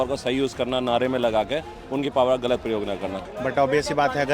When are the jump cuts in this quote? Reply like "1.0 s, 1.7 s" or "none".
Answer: 3.2 s

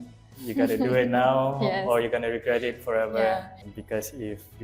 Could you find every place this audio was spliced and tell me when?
3.6 s

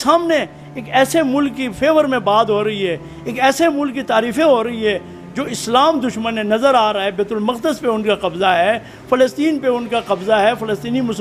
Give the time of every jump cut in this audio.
none

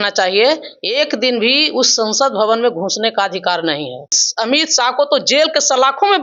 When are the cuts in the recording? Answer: 4.2 s

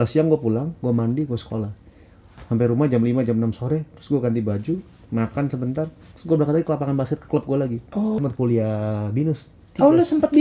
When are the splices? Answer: 8.2 s

